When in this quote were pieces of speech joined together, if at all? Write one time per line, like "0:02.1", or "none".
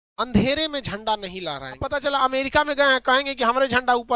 0:01.8